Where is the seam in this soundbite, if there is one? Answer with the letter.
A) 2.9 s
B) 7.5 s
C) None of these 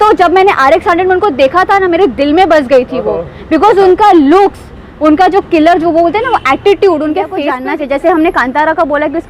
B